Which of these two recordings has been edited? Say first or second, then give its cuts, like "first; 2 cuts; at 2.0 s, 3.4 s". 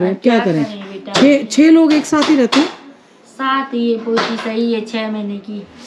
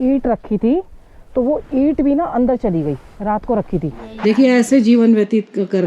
second; 1 cut; at 4.1 s